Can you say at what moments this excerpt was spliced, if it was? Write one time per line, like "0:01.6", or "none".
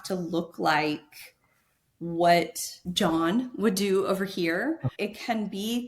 0:02.8
0:04.9